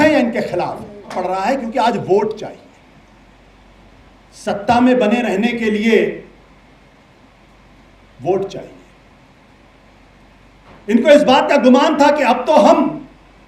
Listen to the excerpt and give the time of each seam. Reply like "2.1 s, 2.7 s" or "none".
1.2 s